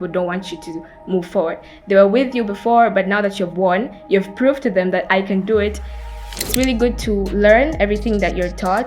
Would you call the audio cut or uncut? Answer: cut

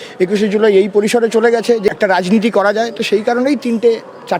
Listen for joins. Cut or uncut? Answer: cut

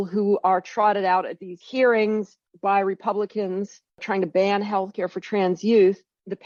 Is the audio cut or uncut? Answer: uncut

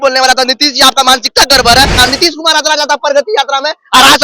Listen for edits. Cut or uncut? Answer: cut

